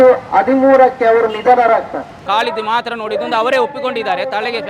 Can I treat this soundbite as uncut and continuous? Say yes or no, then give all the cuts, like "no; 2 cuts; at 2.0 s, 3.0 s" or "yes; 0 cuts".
no; 1 cut; at 2.2 s